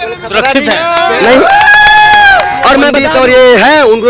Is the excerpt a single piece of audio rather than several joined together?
no; 1 cut; at 3.0 s

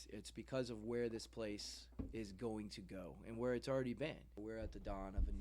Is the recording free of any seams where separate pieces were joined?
no; 1 cut; at 4.4 s

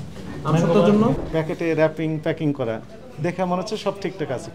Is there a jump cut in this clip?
yes; 1 cut; at 1.2 s

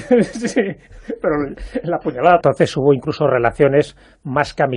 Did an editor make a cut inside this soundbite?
no; 0 cuts

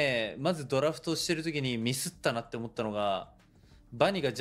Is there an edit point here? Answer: no; 0 cuts

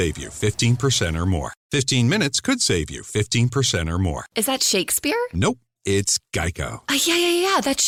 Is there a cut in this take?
no; 0 cuts

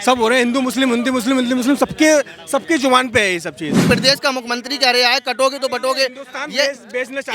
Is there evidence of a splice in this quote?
yes; 1 cut; at 3.8 s

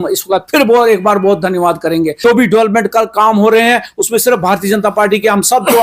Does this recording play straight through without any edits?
no; 1 cut; at 2.2 s

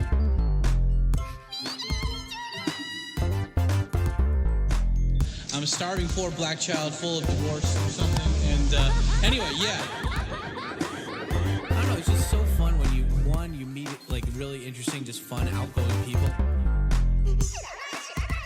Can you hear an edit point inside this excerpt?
yes; 1 cut; at 11.4 s

